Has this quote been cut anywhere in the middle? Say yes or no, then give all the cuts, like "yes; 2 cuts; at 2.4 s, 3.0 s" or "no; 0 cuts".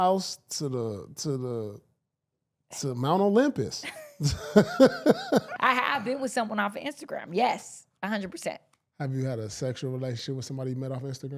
yes; 1 cut; at 5.5 s